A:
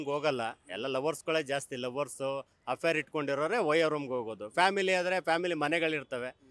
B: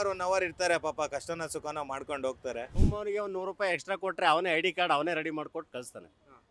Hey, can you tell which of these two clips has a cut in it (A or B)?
B